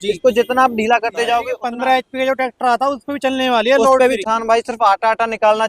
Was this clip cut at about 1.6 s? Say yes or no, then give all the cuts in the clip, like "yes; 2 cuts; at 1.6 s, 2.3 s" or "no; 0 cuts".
yes; 2 cuts; at 1.6 s, 4.2 s